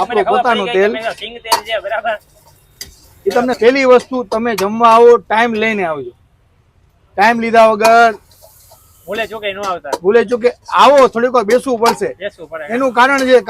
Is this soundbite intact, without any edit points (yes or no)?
no